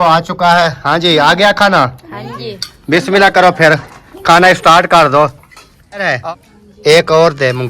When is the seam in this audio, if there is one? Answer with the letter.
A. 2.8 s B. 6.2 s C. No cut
B